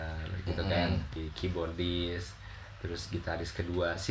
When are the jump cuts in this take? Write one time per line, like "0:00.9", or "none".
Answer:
0:01.2